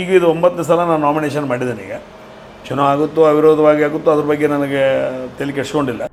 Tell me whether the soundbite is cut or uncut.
uncut